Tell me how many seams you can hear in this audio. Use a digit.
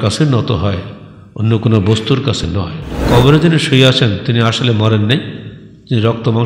1